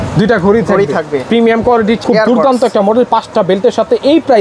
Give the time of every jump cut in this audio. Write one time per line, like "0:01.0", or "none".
0:02.0